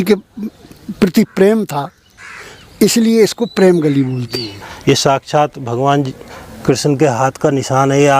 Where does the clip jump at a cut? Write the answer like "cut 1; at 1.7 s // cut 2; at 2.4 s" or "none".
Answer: cut 1; at 4.7 s